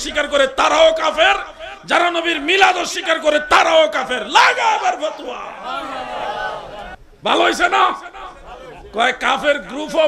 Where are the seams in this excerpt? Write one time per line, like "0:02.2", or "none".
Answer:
0:07.0